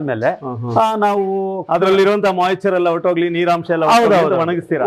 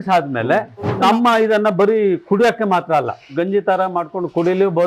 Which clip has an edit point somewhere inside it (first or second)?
second